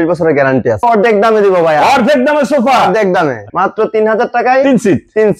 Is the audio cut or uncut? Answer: cut